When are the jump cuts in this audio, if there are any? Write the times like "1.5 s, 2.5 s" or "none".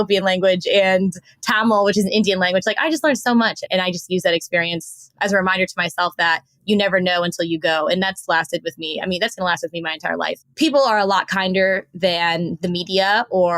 10.4 s